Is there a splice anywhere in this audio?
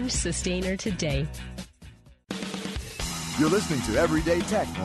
no; 0 cuts

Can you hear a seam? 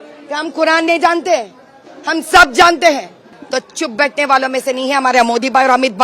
yes; 1 cut; at 3.3 s

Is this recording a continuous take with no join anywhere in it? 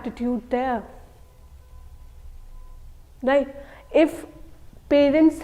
yes; 0 cuts

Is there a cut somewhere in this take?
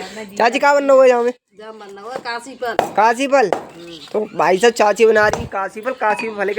no; 0 cuts

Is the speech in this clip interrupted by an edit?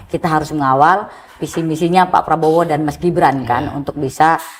no; 0 cuts

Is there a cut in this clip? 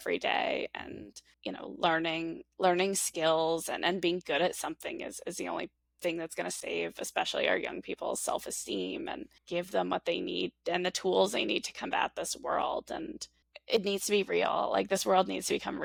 no; 0 cuts

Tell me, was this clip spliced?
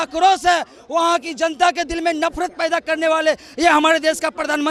no; 0 cuts

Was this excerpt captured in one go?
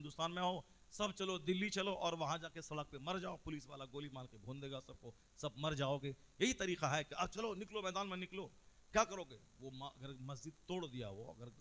yes; 0 cuts

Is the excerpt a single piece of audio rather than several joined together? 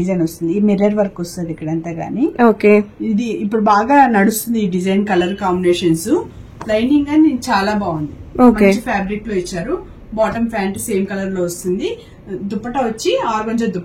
yes; 0 cuts

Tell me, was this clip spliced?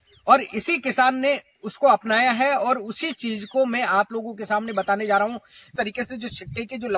yes; 1 cut; at 5.7 s

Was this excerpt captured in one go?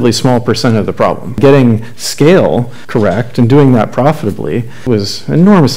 no; 3 cuts; at 1.4 s, 2.8 s, 4.8 s

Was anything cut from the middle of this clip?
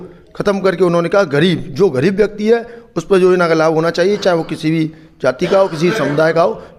no; 0 cuts

